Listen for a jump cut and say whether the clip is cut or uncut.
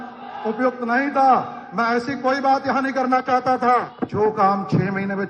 cut